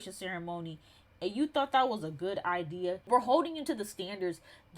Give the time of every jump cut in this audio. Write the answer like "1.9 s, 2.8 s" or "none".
3.0 s